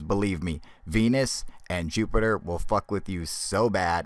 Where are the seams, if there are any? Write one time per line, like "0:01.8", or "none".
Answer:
0:01.7